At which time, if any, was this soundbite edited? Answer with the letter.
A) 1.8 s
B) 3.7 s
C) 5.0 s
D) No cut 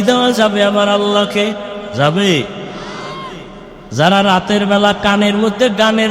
A